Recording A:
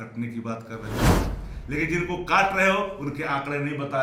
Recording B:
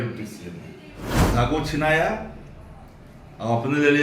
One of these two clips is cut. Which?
B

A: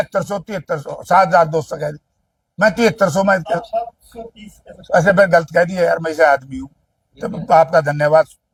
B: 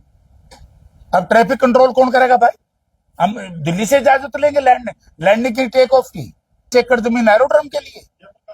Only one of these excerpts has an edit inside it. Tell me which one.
B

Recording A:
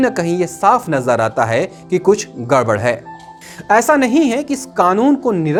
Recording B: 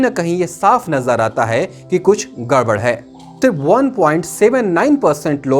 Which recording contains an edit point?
B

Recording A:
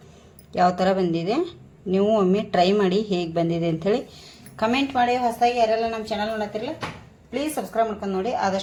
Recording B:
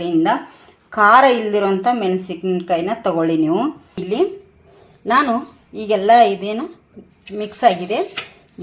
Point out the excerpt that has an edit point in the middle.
B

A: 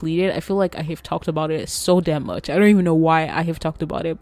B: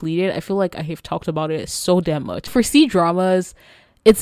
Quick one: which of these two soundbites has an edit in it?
B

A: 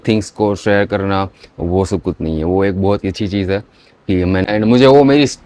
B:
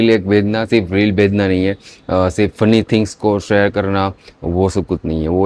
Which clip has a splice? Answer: A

